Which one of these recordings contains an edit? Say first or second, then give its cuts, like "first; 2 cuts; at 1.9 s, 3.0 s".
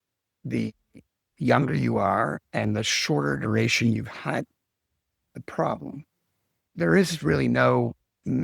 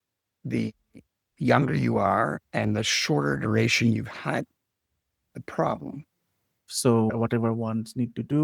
second; 1 cut; at 6.7 s